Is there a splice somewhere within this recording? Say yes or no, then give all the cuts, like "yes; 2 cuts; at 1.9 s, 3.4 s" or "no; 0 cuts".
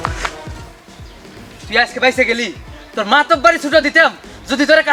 no; 0 cuts